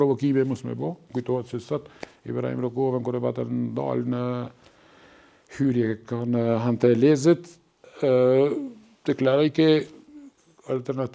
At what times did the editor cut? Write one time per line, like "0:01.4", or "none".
none